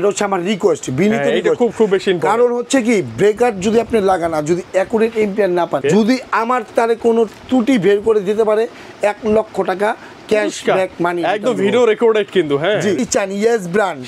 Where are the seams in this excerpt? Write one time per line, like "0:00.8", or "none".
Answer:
0:05.8
0:13.0